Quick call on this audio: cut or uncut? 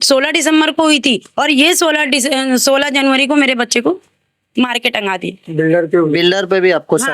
uncut